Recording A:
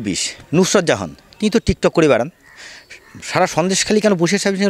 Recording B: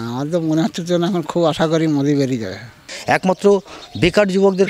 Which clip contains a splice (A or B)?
B